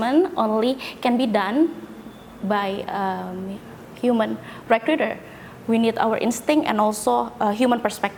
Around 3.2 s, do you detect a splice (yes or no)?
no